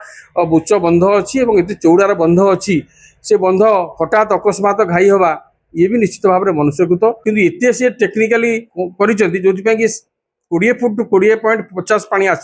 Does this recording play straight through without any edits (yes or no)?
no